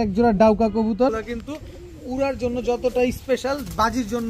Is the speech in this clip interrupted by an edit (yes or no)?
yes